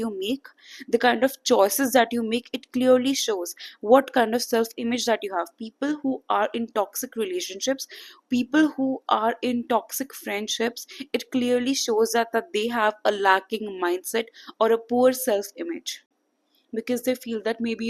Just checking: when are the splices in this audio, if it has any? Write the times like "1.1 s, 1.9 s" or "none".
none